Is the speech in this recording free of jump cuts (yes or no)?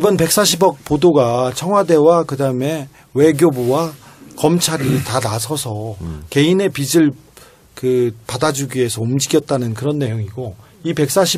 yes